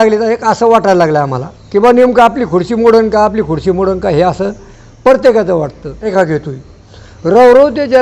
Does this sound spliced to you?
yes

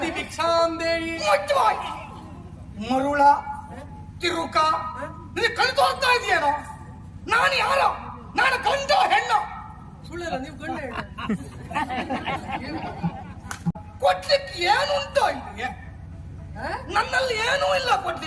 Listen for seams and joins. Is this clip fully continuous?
no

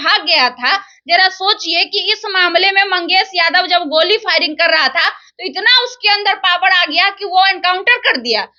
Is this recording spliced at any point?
no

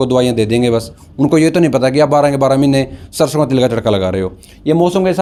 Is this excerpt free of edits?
yes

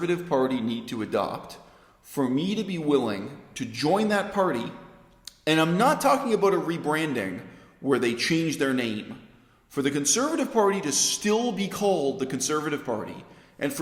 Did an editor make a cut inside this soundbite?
no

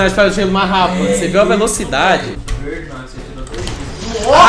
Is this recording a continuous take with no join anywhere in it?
no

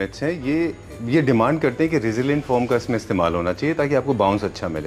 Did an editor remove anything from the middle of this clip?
no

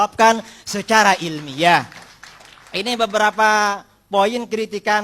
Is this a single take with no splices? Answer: yes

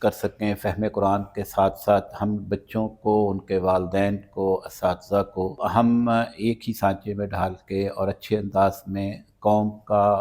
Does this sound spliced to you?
yes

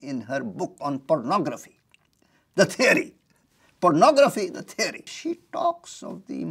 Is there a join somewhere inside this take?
yes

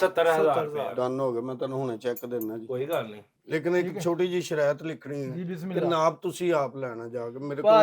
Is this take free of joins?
no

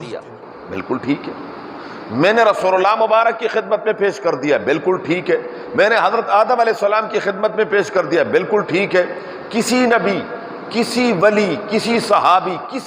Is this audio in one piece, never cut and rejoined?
yes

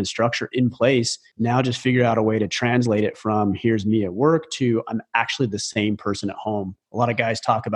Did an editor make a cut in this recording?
yes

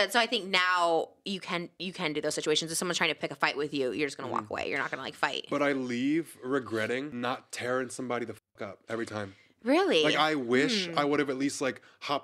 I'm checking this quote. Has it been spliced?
yes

